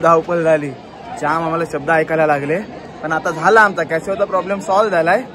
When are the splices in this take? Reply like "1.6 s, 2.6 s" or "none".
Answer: none